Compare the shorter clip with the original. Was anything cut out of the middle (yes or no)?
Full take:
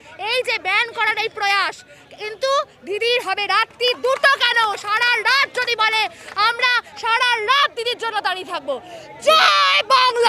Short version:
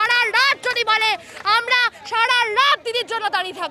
no